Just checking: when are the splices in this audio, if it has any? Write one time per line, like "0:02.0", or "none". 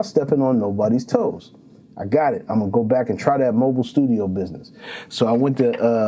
none